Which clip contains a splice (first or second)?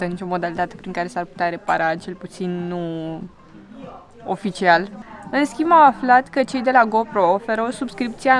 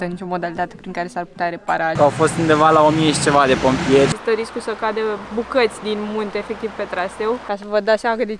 second